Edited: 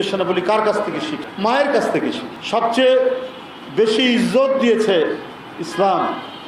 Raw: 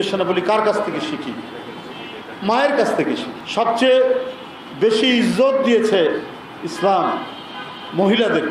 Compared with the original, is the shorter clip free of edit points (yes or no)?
no